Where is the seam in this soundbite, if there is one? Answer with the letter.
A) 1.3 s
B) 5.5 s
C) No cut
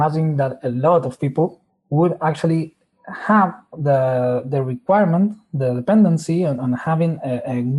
A